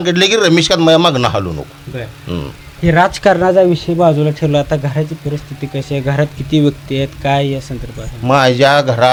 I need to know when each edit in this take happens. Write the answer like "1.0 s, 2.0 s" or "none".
none